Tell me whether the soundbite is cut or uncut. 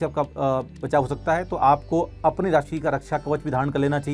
uncut